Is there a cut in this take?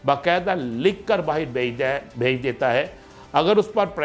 yes; 1 cut; at 3.0 s

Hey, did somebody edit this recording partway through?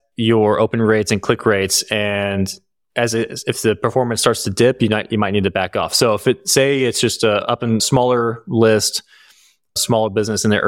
no; 0 cuts

